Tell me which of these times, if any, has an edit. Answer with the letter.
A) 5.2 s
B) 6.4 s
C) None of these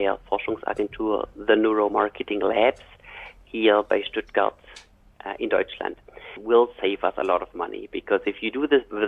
B